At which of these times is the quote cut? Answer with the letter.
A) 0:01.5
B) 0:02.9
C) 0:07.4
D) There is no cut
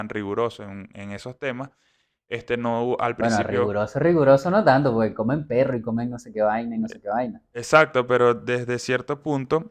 D